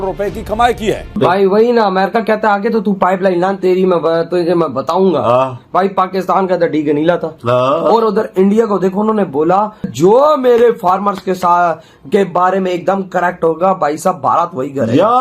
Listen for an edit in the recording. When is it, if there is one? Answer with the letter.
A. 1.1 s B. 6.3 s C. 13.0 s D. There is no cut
A